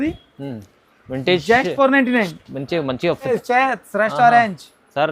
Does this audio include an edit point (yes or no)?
yes